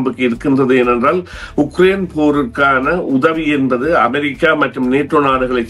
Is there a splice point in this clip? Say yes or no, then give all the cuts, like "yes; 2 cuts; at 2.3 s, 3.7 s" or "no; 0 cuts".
no; 0 cuts